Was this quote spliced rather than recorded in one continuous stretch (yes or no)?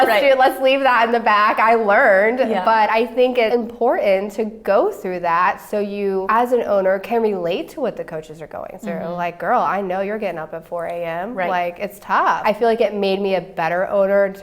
yes